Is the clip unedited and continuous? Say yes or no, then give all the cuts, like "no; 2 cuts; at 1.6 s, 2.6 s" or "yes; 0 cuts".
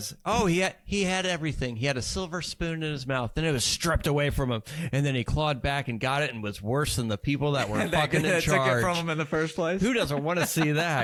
yes; 0 cuts